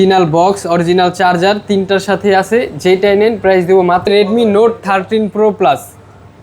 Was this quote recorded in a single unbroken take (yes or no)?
no